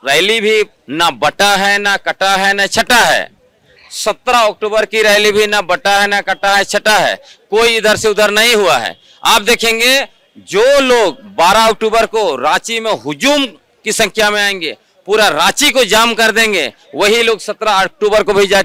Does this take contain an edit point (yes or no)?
no